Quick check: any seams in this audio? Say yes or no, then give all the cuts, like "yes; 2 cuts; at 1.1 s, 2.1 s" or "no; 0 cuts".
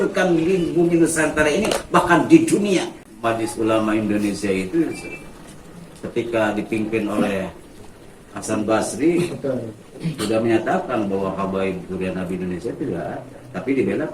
yes; 1 cut; at 3.1 s